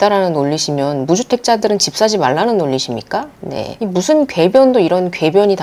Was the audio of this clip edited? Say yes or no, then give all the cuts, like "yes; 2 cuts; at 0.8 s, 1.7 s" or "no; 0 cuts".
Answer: no; 0 cuts